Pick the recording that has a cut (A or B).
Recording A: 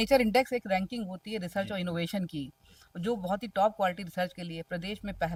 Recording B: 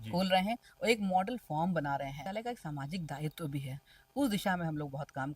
B